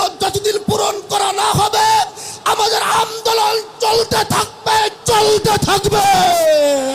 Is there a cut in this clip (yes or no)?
no